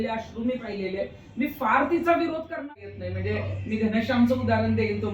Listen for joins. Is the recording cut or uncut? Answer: cut